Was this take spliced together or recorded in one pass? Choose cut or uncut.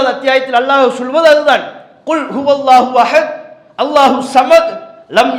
uncut